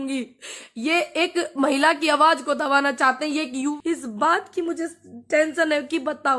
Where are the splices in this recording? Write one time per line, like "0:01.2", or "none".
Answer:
0:03.7

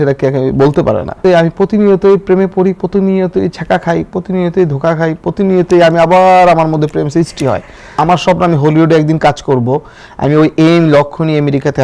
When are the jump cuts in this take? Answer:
0:01.2
0:08.0

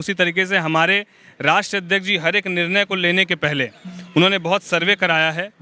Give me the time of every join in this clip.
none

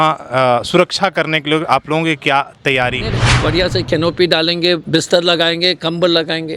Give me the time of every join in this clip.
0:03.3

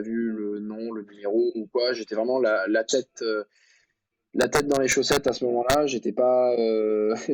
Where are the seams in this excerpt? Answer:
none

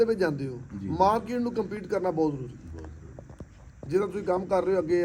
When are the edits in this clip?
none

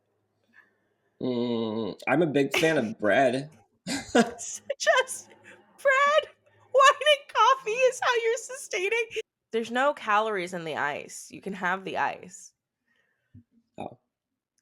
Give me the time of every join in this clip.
0:09.4

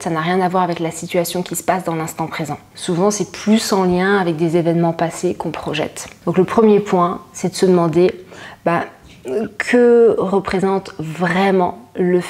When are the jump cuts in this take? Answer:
0:02.7
0:06.1

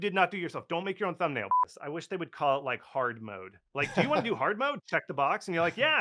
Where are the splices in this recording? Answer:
0:01.6

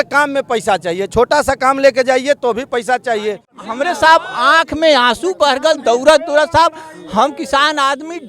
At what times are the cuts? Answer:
0:03.6

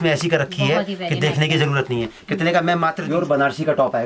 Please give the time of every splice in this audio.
0:03.0

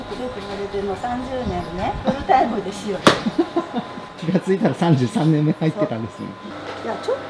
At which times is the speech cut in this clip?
0:02.0

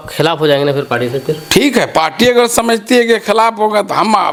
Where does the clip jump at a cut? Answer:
none

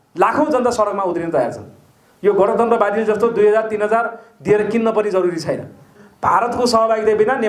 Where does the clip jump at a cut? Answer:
0:05.9

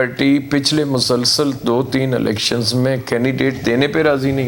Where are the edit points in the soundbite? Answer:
none

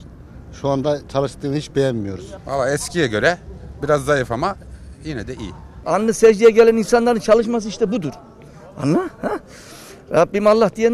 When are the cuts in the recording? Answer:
0:02.3
0:05.8

